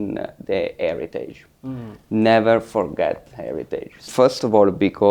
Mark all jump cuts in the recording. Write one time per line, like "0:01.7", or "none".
0:04.1